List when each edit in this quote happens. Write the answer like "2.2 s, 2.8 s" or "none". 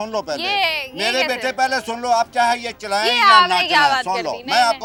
none